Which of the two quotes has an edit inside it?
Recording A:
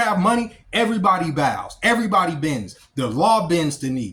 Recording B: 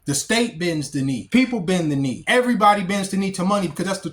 B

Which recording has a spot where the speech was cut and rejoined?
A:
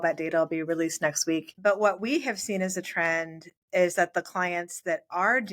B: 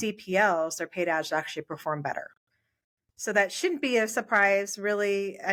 A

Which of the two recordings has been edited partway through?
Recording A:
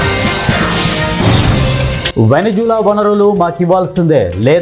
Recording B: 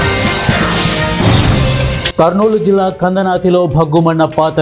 B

